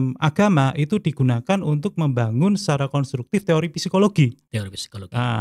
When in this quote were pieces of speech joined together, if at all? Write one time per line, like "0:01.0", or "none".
none

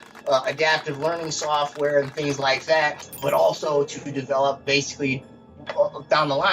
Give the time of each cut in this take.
0:03.1

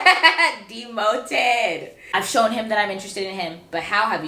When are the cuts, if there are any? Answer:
0:02.0

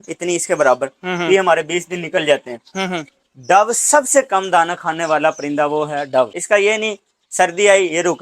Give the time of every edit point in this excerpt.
0:06.4

